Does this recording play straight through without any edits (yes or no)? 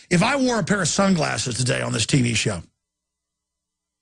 no